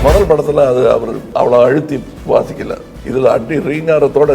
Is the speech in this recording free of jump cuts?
no; 3 cuts; at 1.2 s, 2.1 s, 3.0 s

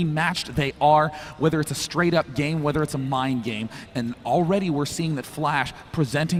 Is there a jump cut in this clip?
no; 0 cuts

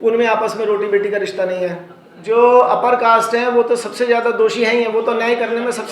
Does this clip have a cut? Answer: yes; 1 cut; at 2.2 s

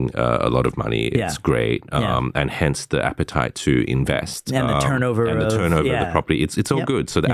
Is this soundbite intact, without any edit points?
yes; 0 cuts

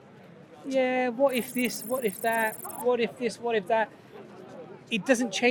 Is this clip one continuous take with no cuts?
yes; 0 cuts

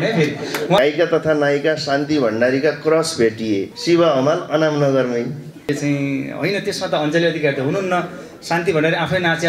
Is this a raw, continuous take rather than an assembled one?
no; 3 cuts; at 0.8 s, 3.7 s, 5.7 s

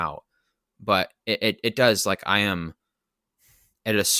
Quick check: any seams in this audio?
no; 0 cuts

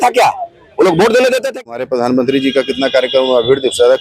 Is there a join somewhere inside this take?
yes; 1 cut; at 1.6 s

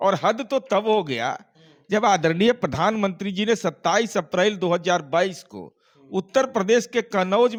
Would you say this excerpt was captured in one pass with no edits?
yes; 0 cuts

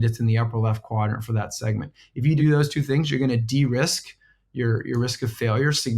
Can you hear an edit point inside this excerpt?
yes; 1 cut; at 2.4 s

